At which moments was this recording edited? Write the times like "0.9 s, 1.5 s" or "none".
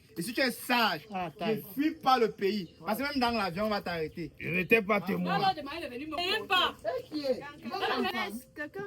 6.2 s